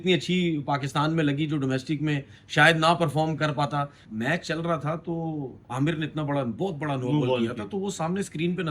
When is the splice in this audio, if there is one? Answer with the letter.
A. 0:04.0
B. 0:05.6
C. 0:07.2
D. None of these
A